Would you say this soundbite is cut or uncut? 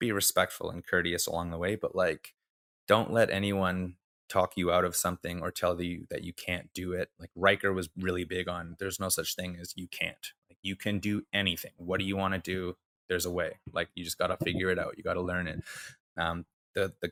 uncut